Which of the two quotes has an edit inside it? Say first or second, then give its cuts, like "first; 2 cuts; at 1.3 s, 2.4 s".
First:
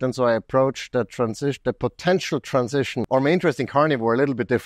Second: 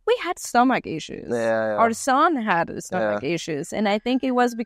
first; 1 cut; at 3.0 s